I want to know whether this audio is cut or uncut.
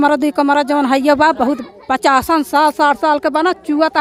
uncut